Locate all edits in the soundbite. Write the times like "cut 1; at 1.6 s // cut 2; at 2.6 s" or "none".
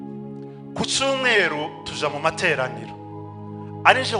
cut 1; at 1.0 s